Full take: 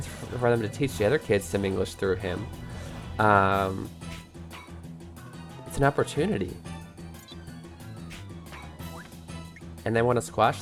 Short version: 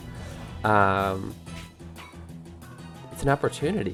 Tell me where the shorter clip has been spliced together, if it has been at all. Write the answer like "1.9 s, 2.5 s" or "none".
none